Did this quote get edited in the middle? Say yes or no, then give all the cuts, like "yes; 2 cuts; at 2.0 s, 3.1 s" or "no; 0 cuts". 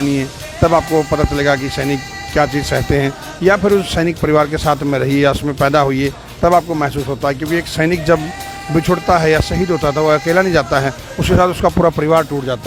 no; 0 cuts